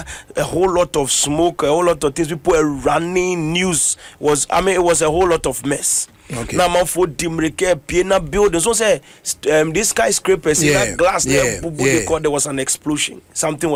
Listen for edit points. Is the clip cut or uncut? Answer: uncut